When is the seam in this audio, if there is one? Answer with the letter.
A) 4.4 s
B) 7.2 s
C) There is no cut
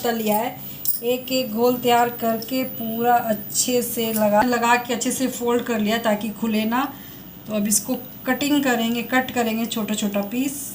A